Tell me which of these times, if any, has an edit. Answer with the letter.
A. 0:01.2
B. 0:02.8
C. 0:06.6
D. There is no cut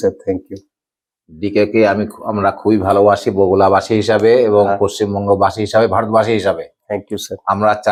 D